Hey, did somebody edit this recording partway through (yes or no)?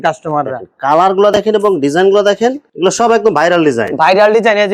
no